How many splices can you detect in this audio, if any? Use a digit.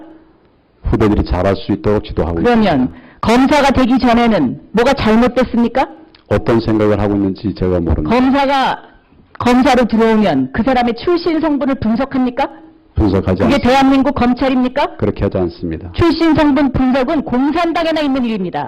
1